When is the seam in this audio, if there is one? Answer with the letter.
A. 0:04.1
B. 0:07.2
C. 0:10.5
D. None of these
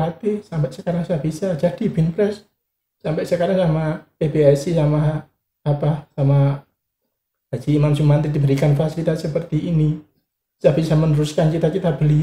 D